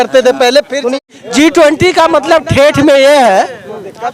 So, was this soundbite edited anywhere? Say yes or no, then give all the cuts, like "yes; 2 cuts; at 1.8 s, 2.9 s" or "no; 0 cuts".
yes; 1 cut; at 1.0 s